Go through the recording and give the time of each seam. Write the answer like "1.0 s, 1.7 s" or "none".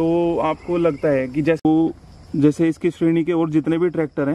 1.6 s